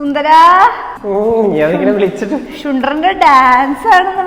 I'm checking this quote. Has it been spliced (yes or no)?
no